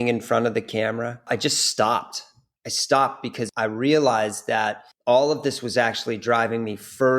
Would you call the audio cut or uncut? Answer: cut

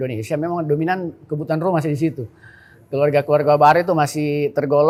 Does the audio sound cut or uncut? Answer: uncut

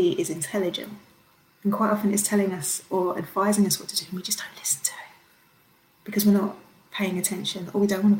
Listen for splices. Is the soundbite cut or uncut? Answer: uncut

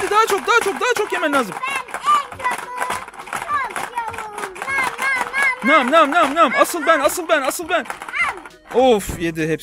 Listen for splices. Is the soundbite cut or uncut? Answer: uncut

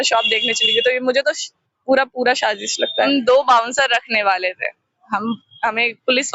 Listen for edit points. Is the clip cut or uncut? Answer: cut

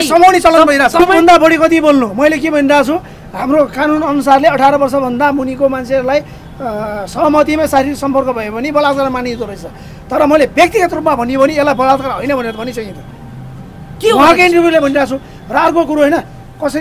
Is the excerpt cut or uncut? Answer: cut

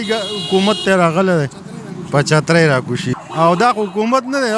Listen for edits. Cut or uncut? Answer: cut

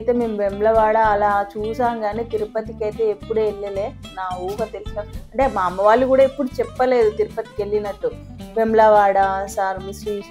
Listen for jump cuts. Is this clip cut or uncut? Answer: uncut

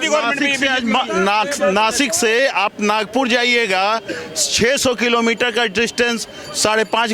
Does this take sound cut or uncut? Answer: uncut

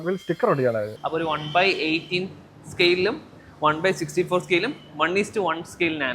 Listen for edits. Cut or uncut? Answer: cut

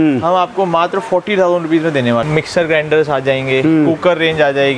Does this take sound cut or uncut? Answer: cut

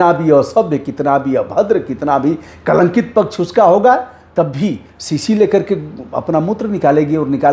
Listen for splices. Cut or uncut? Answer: uncut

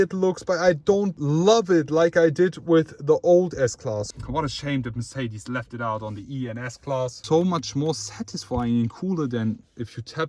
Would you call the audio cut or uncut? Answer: cut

